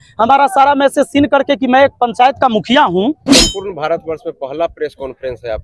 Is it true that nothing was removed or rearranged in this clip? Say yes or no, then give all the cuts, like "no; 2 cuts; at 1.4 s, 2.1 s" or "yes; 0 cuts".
no; 1 cut; at 3.2 s